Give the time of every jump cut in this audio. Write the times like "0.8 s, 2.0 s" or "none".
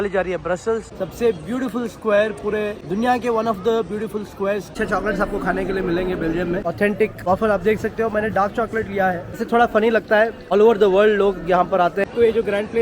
0.9 s, 2.8 s, 4.7 s, 6.9 s, 9.4 s, 10.4 s, 12.0 s